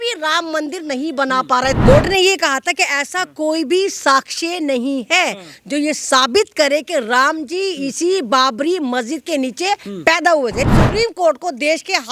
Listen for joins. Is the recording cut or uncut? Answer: cut